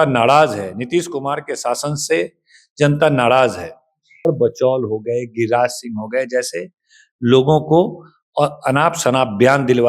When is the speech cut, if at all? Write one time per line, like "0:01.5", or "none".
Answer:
0:04.3